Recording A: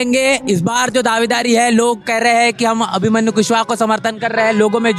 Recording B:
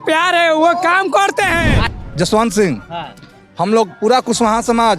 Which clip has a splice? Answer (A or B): B